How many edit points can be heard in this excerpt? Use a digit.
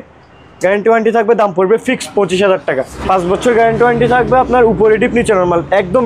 1